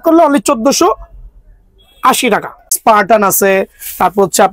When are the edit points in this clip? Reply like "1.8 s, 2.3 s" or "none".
2.6 s